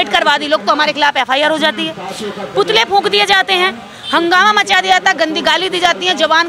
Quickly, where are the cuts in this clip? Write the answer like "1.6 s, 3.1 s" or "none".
none